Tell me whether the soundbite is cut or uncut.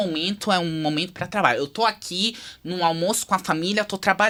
uncut